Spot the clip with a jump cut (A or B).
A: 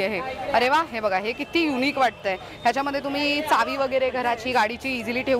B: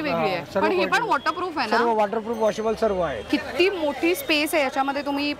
B